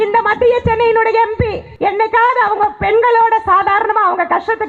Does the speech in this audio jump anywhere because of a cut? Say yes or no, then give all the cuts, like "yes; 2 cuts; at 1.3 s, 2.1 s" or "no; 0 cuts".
yes; 1 cut; at 1.6 s